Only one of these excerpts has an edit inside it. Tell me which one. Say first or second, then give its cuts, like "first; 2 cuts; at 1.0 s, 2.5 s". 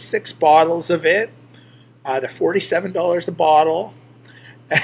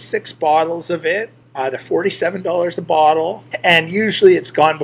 second; 2 cuts; at 1.4 s, 3.5 s